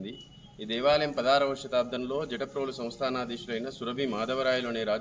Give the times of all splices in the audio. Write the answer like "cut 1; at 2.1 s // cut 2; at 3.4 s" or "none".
none